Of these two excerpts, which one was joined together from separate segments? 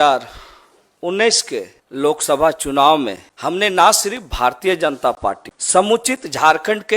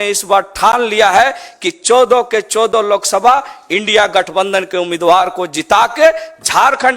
first; 3 cuts; at 1.8 s, 3.2 s, 5.5 s

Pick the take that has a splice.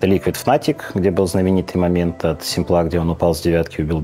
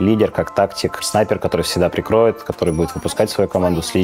second; 1 cut; at 1.0 s

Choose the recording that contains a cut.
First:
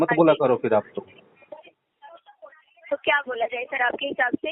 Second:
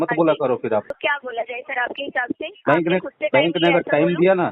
second; 1 cut; at 0.9 s

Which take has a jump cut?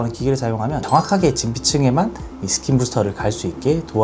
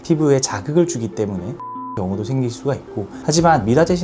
second; 2 cuts; at 1.6 s, 3.2 s

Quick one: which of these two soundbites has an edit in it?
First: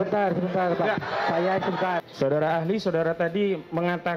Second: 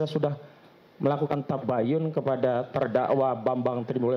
first; 1 cut; at 2.0 s

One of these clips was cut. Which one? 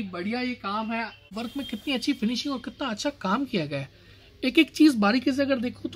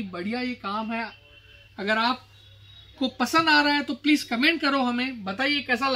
first; 1 cut; at 1.3 s

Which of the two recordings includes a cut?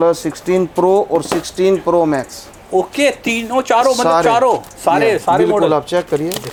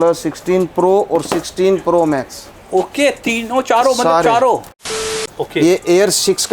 second; 1 cut; at 4.9 s

